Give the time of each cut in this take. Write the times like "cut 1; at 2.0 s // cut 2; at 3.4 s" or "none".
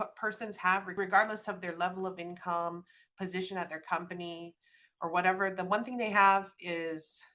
cut 1; at 0.9 s